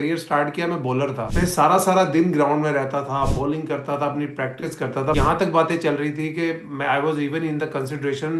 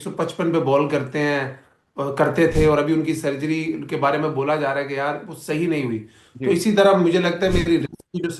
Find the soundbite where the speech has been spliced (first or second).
first